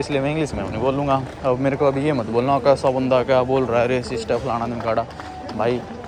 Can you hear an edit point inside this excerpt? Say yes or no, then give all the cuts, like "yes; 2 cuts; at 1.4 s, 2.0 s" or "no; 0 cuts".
no; 0 cuts